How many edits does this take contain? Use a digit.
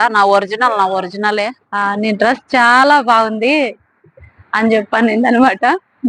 1